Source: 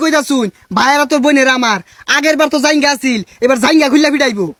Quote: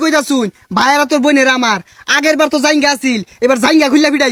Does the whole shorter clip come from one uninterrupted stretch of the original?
yes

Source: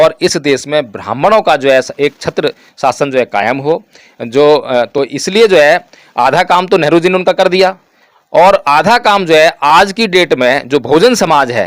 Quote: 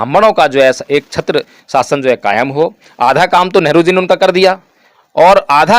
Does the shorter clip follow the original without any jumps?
no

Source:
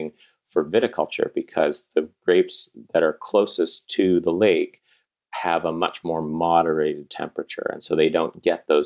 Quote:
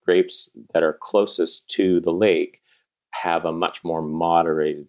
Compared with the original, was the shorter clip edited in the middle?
no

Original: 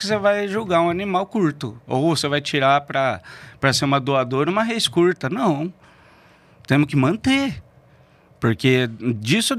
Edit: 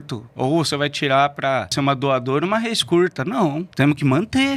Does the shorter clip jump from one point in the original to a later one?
yes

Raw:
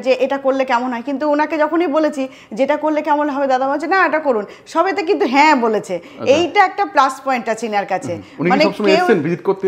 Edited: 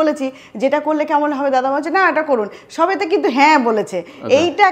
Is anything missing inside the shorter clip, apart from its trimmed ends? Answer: no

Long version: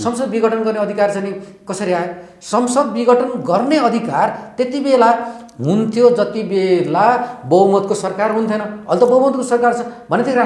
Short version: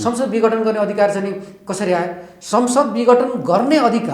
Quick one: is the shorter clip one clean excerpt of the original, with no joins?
yes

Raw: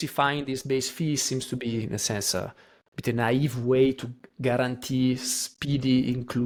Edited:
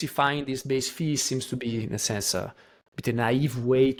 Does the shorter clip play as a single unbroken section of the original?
yes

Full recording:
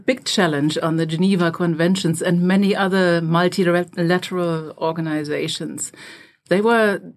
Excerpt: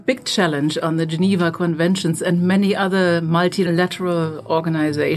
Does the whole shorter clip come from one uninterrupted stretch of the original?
no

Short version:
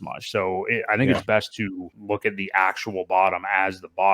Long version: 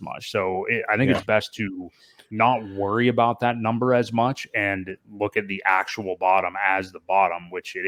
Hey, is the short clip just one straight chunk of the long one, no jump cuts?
no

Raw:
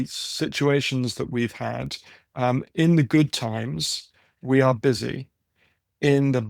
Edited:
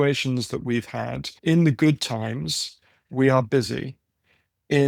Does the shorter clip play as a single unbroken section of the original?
no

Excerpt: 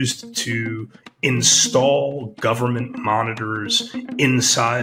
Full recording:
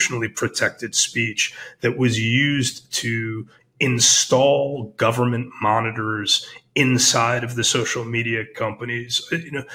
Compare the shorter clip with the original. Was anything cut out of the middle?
no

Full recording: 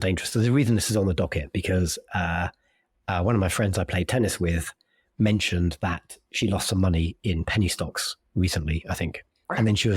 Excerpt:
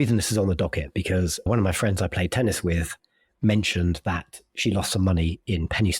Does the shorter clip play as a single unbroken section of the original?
no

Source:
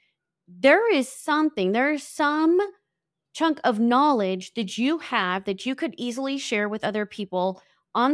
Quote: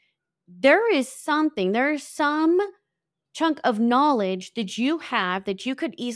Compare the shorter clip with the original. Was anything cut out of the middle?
no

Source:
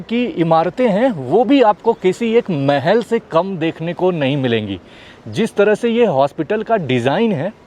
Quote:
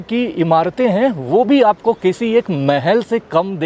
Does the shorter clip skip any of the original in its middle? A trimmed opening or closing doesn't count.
no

